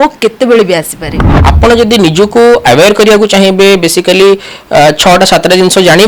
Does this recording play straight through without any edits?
no; 1 cut; at 1.2 s

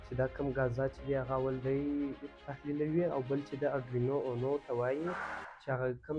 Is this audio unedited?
yes; 0 cuts

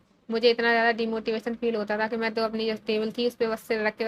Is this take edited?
no; 0 cuts

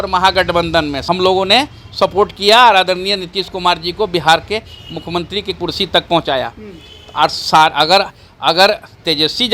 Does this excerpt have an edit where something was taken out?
yes; 1 cut; at 1.0 s

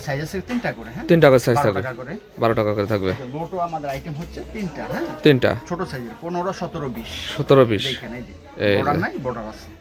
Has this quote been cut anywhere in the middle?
no; 0 cuts

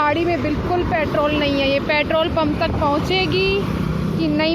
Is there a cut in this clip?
no; 0 cuts

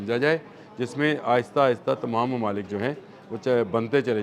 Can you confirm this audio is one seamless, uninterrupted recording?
yes; 0 cuts

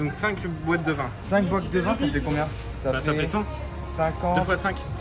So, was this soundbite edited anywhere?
no; 0 cuts

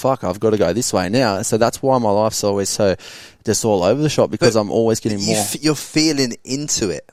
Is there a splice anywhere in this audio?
no; 0 cuts

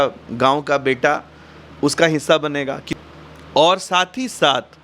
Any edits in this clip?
yes; 1 cut; at 2.8 s

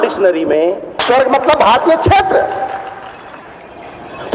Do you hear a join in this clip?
yes; 1 cut; at 1.0 s

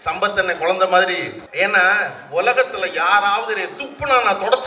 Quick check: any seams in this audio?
yes; 1 cut; at 1.4 s

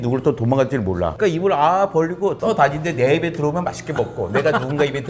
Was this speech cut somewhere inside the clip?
yes; 2 cuts; at 1.1 s, 2.4 s

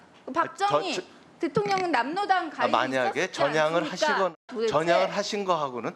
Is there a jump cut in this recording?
yes; 1 cut; at 4.4 s

